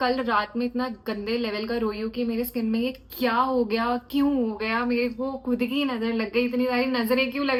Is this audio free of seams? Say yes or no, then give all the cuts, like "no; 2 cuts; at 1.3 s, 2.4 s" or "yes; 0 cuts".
yes; 0 cuts